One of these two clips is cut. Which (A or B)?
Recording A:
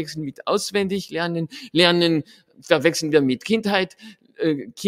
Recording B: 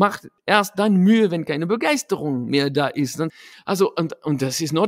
B